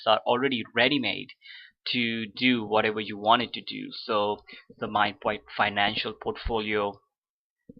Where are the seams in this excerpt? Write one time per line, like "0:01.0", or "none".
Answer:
0:02.7